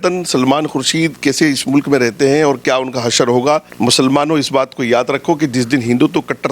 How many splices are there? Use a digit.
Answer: 1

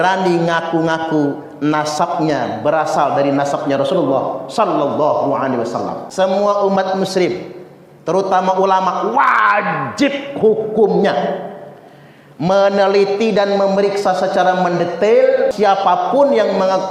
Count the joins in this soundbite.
2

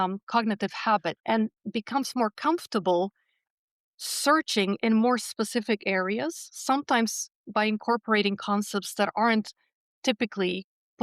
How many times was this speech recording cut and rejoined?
1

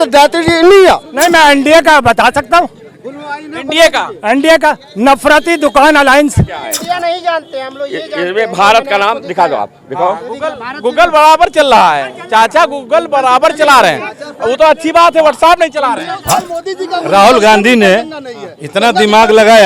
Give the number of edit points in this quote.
3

